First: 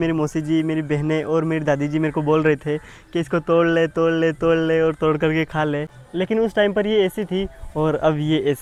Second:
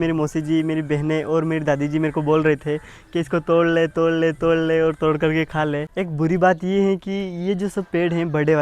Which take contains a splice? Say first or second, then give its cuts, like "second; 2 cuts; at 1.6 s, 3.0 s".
second; 1 cut; at 5.9 s